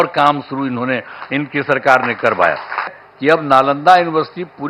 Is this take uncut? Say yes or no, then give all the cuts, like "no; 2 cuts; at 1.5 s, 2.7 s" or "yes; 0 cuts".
no; 1 cut; at 3.0 s